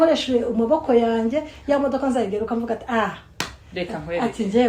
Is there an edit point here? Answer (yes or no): no